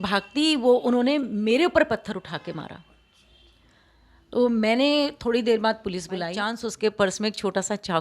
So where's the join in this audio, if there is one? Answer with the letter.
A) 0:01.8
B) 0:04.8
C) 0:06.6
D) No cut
C